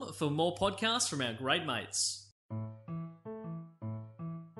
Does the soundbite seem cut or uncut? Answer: cut